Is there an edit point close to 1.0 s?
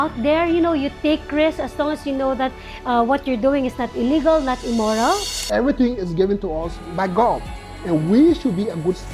no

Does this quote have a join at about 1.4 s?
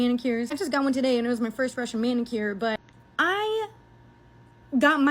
no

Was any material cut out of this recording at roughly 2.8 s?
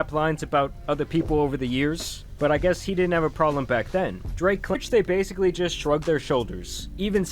no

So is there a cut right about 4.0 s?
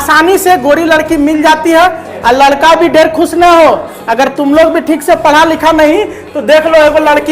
no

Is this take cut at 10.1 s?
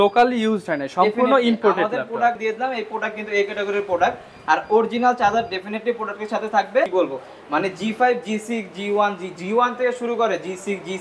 no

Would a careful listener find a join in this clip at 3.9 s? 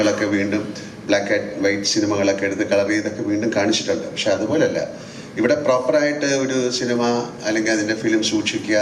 no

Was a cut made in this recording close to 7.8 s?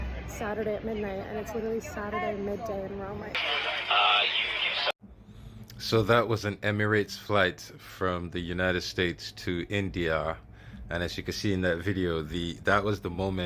no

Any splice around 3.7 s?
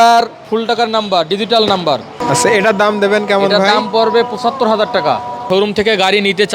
no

